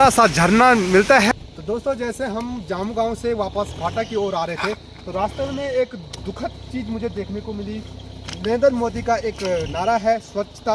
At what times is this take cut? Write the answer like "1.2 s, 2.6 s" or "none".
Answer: 1.3 s